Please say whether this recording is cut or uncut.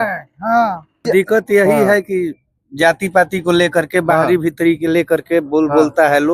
cut